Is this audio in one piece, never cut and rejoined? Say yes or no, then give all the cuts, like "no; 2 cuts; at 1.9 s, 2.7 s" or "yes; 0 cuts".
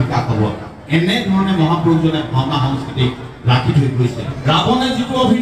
no; 1 cut; at 4.3 s